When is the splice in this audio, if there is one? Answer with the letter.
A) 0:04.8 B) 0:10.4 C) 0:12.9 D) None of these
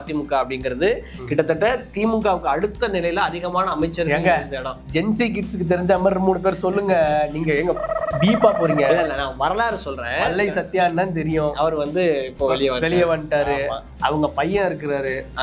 D